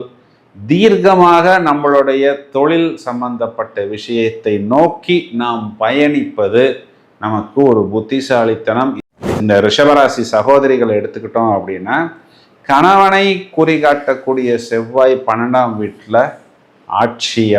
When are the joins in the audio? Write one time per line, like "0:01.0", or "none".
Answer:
0:09.1